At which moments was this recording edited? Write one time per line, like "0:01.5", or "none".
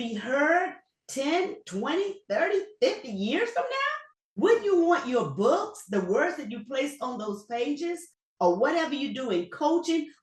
0:04.1

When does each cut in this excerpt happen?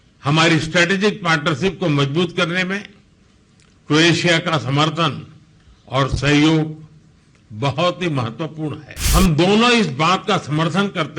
0:08.9

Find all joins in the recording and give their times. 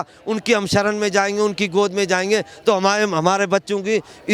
none

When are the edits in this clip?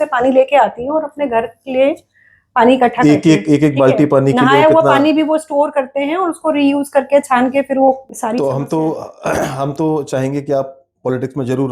0:08.0

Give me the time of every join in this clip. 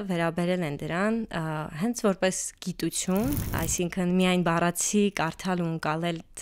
0:03.5

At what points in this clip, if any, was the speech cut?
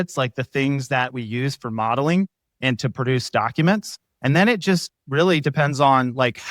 0:04.1

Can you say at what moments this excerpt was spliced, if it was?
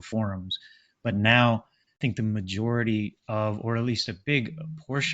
0:01.9

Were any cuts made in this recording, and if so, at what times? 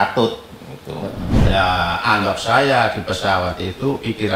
0:01.3

